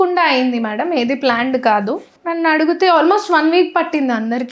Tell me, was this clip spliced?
yes; 1 cut; at 2.1 s

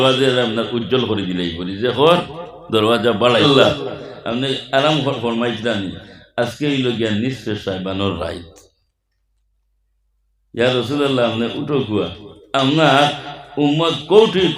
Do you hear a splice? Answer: yes; 1 cut; at 3.4 s

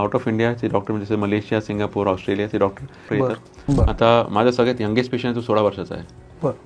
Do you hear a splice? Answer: yes; 1 cut; at 3.3 s

